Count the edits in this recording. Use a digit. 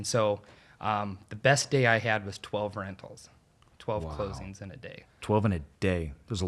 1